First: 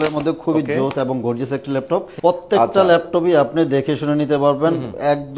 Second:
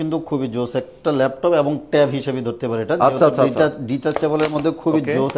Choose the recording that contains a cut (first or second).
first